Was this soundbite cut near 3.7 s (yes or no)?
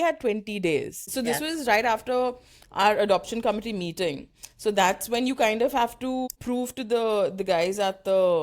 no